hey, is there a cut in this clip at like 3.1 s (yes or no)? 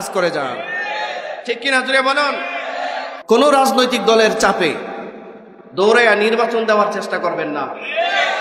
yes